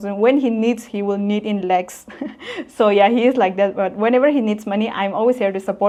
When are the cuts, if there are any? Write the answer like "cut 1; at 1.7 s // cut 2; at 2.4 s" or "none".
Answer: none